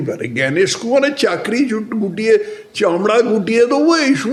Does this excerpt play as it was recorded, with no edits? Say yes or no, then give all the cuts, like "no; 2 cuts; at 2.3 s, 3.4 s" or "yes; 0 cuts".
yes; 0 cuts